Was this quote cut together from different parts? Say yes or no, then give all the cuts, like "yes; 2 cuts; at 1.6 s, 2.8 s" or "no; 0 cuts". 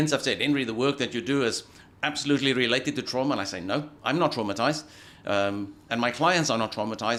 no; 0 cuts